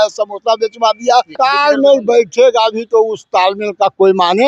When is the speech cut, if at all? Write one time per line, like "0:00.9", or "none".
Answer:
0:01.3